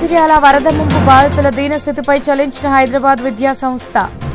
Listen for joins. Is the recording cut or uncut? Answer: uncut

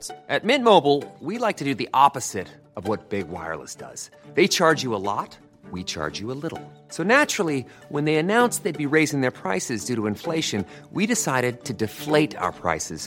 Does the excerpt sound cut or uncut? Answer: uncut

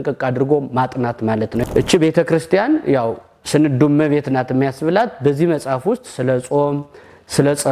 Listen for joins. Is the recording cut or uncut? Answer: cut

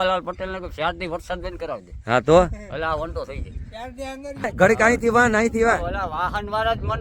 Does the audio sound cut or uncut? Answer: cut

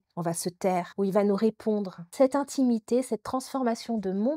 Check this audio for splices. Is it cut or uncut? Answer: cut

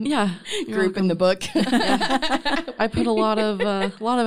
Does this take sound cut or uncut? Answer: cut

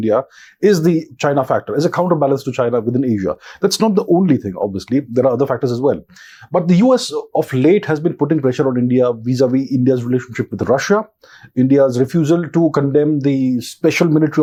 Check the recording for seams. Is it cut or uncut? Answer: uncut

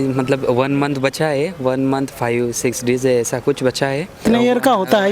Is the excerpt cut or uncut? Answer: cut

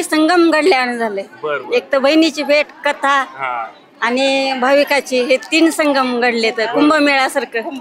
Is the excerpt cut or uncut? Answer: uncut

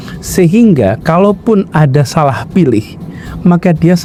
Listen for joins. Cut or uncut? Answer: uncut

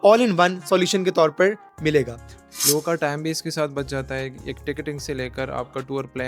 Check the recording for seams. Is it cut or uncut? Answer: cut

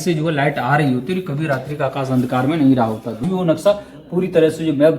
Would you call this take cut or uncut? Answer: cut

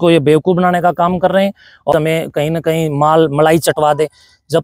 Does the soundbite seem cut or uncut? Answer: cut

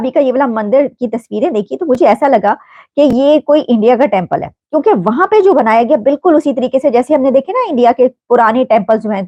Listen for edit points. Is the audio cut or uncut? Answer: uncut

